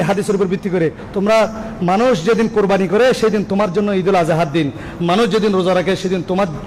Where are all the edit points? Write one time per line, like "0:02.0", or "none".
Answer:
none

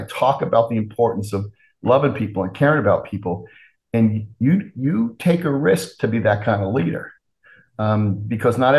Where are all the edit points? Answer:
none

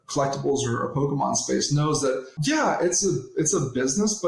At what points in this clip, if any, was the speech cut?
0:02.3

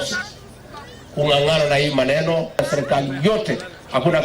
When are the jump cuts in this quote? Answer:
0:02.6

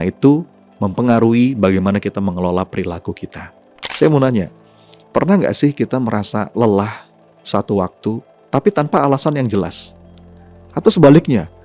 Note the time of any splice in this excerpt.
0:03.9

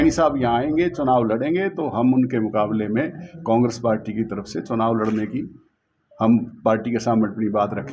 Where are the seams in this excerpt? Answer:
none

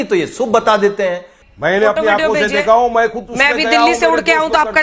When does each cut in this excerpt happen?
0:01.0

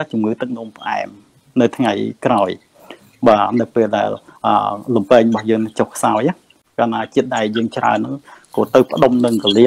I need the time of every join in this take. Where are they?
0:06.6

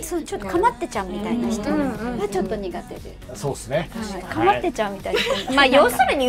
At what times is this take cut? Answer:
none

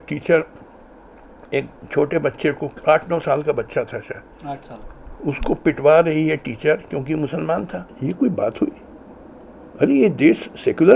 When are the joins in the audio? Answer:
0:07.9

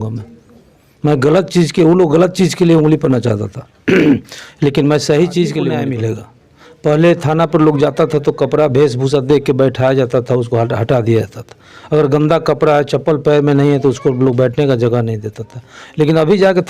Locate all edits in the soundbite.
0:05.8

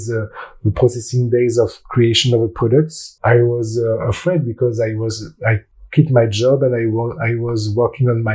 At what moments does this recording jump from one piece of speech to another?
0:03.0
0:05.7

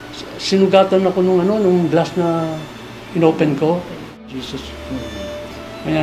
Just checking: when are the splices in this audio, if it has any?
0:04.2

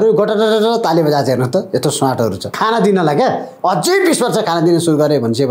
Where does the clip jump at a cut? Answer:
0:02.5

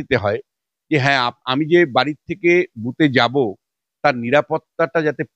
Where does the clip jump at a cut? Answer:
none

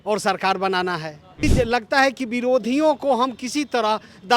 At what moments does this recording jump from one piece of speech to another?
0:01.4

